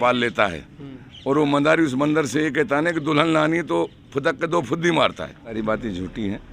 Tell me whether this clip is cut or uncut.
cut